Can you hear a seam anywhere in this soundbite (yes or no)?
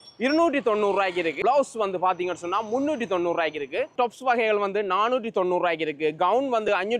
yes